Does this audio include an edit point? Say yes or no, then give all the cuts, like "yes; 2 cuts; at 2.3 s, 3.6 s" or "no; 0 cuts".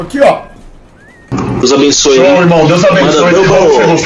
yes; 1 cut; at 1.2 s